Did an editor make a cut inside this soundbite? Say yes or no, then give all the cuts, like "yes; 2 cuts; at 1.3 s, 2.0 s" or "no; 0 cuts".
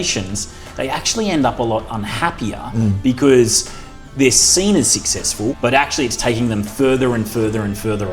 yes; 1 cut; at 5.6 s